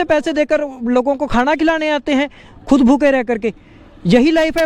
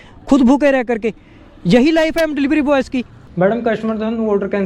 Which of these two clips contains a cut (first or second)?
second